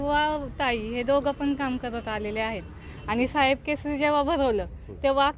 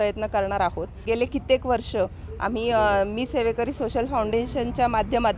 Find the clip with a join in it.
second; 1 cut; at 1.0 s

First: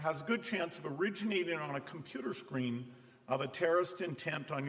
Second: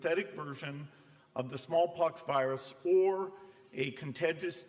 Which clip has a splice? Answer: first; 1 cut; at 2.9 s

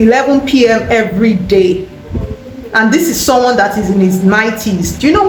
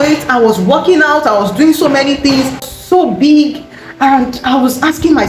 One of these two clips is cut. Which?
second; 1 cut; at 2.7 s

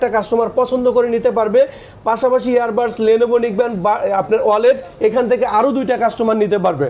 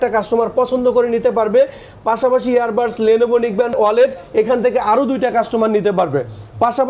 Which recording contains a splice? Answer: second; 1 cut; at 3.7 s

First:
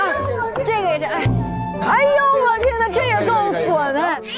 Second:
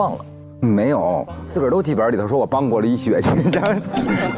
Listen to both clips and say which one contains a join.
second; 1 cut; at 1.4 s

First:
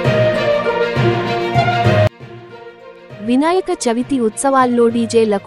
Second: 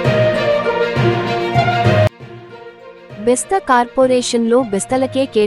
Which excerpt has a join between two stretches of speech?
first; 1 cut; at 2.2 s

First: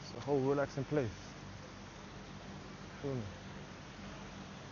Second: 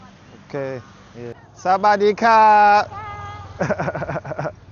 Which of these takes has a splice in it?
second; 1 cut; at 1.4 s

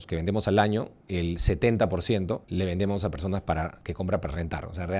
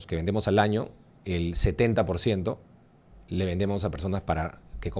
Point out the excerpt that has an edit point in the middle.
first; 3 cuts; at 1.0 s, 2.5 s, 3.8 s

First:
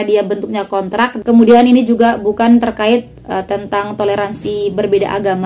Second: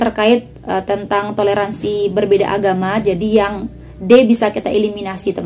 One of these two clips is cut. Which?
first; 1 cut; at 1.2 s

